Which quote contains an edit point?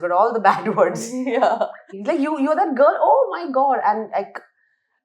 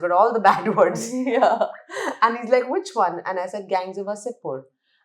first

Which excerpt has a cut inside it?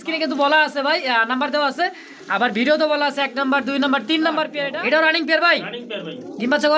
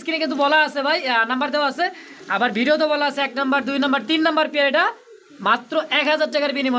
first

